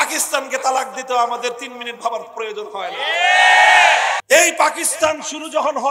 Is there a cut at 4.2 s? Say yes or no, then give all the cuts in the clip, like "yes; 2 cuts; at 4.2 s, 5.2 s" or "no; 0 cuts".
yes; 1 cut; at 4.2 s